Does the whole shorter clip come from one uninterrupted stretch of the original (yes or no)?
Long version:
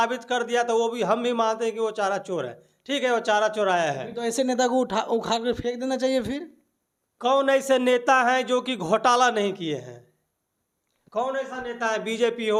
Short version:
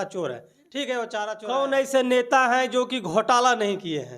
no